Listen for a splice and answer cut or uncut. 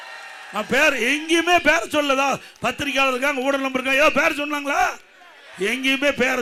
uncut